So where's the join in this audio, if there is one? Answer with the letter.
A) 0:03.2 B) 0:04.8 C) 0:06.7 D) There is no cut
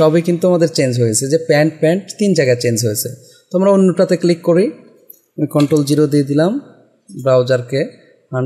D